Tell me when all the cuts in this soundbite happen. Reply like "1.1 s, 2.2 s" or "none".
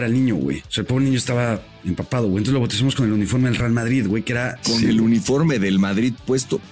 4.5 s